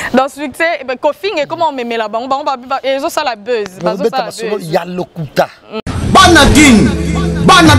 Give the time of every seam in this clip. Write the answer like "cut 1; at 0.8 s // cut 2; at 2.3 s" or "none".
cut 1; at 5.8 s